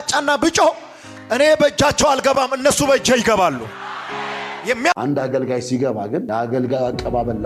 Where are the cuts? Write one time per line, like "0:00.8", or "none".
0:04.9